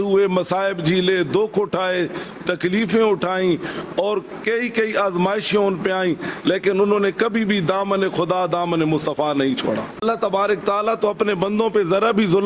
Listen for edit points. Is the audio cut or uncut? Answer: cut